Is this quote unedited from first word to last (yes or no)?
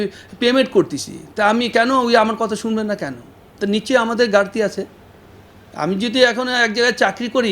yes